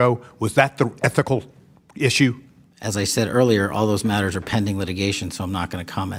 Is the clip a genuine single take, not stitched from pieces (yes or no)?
yes